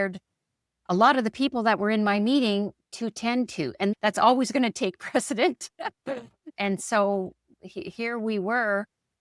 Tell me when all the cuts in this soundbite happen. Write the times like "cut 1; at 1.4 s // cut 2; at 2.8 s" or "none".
cut 1; at 3.9 s